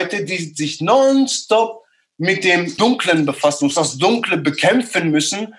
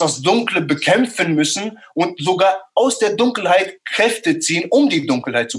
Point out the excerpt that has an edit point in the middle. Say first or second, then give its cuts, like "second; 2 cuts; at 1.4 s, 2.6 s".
first; 1 cut; at 2.7 s